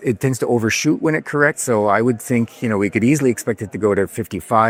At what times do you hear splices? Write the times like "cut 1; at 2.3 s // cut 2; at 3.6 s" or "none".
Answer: none